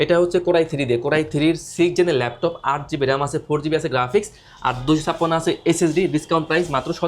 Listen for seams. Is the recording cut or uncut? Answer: uncut